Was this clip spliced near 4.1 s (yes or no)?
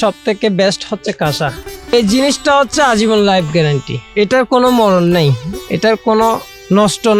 no